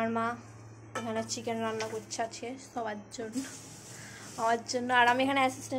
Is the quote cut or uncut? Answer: uncut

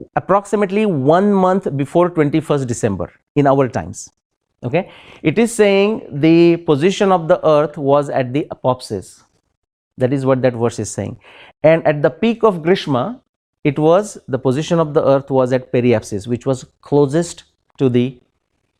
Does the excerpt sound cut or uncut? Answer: uncut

